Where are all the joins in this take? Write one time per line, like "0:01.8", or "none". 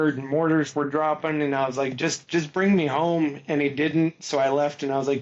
none